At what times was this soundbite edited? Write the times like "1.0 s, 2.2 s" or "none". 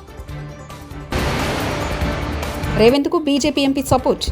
1.1 s, 2.7 s